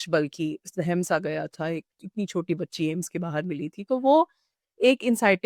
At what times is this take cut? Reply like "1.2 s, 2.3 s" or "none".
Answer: none